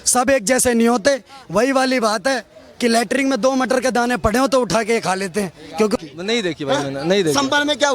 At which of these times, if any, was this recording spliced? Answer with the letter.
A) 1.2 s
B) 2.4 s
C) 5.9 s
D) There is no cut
C